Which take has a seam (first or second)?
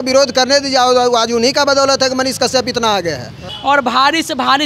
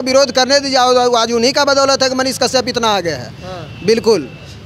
first